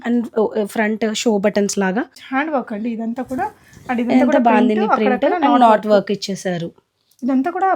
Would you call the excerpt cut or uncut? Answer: cut